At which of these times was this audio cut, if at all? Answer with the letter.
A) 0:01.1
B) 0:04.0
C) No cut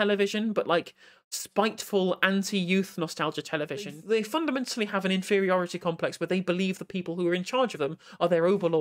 B